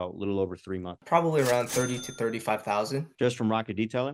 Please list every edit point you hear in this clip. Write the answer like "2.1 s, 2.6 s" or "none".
1.0 s, 3.1 s

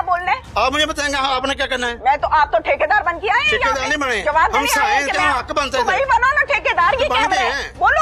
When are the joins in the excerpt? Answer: none

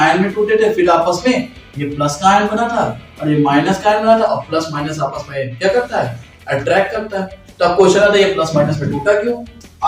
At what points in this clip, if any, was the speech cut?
none

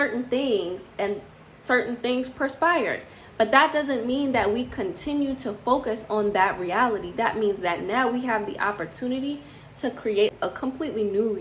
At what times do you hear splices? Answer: 10.3 s

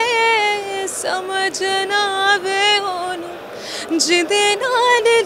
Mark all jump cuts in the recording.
none

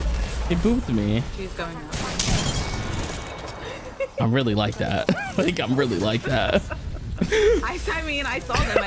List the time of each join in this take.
7.3 s

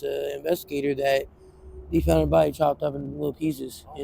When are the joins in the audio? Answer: none

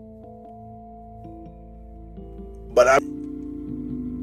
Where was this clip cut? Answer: 2.9 s

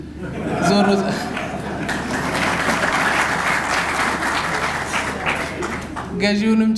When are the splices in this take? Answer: none

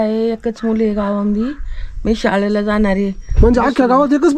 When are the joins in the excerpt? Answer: none

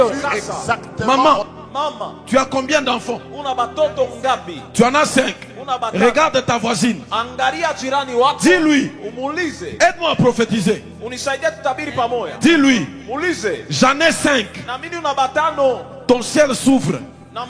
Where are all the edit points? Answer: 0.9 s

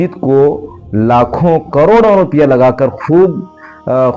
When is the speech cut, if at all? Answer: none

